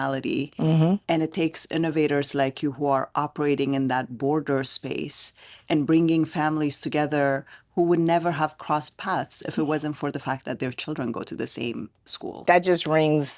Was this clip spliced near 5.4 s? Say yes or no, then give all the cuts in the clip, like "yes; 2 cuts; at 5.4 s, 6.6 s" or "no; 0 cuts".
no; 1 cut; at 12.4 s